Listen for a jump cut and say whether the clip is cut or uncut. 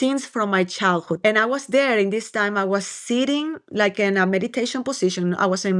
cut